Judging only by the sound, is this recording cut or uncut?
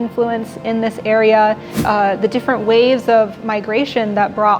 cut